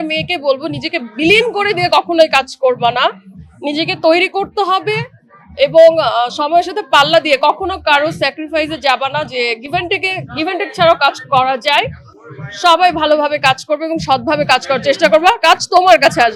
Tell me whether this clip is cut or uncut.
uncut